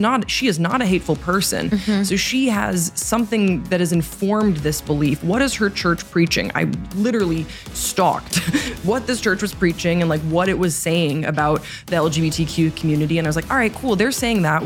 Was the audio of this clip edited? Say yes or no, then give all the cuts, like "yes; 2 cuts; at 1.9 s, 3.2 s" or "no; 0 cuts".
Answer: no; 0 cuts